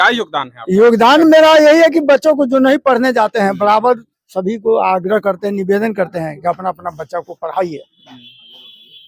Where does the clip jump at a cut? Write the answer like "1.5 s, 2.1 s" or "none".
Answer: none